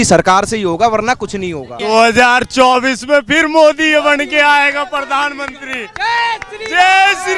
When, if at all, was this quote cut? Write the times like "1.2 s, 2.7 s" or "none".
1.8 s